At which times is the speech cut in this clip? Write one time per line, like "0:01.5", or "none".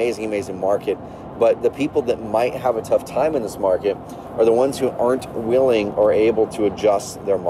none